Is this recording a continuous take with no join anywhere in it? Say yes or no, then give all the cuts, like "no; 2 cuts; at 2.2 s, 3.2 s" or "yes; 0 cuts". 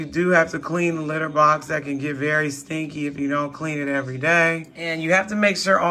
no; 1 cut; at 4.8 s